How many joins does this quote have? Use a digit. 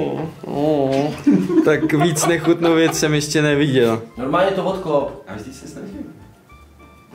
1